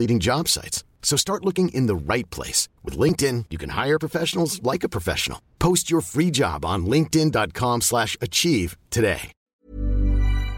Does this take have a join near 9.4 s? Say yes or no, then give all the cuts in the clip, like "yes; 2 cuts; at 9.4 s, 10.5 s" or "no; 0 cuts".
yes; 1 cut; at 9.4 s